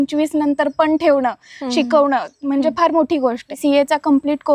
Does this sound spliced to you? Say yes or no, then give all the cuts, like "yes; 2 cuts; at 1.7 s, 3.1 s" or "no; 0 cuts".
yes; 1 cut; at 3.6 s